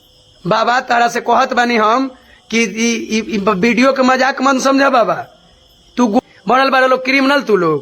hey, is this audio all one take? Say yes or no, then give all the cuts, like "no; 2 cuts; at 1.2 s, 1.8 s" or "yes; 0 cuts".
no; 1 cut; at 6.2 s